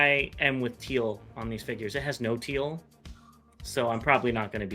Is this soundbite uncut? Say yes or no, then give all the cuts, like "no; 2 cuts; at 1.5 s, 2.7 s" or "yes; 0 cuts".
yes; 0 cuts